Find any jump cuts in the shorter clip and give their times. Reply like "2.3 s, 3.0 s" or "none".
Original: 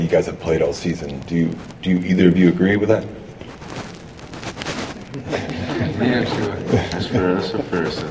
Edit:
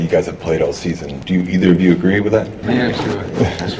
1.1 s, 2.6 s